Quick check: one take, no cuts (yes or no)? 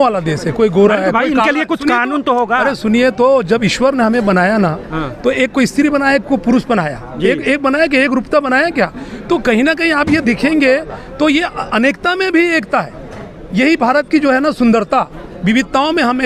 yes